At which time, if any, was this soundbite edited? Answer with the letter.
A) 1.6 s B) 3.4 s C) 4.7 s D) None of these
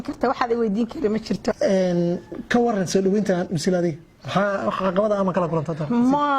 A